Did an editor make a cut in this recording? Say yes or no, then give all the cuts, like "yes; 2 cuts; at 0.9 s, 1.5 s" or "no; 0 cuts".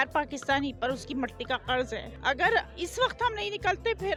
no; 0 cuts